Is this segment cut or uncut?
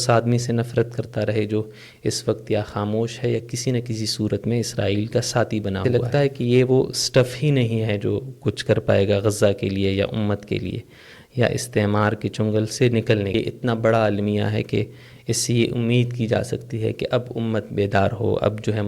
cut